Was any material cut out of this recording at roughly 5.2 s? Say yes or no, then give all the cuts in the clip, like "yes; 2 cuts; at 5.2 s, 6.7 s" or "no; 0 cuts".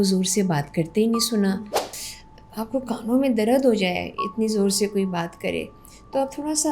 no; 1 cut; at 2.0 s